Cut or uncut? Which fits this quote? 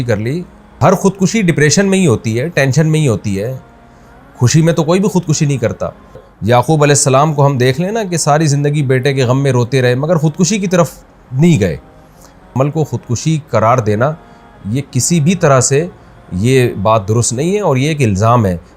cut